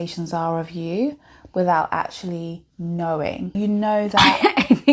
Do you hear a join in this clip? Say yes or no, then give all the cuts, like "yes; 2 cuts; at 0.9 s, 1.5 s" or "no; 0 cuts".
yes; 1 cut; at 3.5 s